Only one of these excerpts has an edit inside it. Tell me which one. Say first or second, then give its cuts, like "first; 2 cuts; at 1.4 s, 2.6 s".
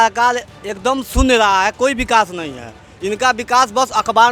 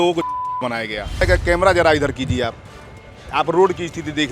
second; 1 cut; at 1.2 s